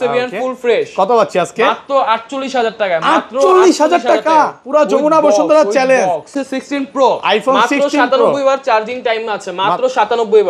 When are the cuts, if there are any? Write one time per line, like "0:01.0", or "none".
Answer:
0:06.3